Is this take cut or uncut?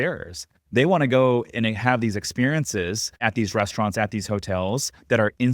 cut